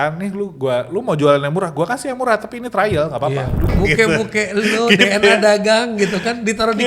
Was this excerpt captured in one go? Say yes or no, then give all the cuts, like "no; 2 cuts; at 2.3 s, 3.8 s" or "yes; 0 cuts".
no; 1 cut; at 3.7 s